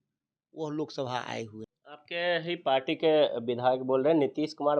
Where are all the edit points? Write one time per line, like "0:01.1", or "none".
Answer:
0:01.6